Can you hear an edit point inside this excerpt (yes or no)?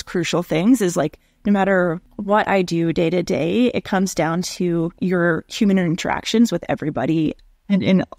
yes